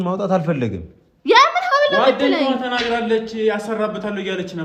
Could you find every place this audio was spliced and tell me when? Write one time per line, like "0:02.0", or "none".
none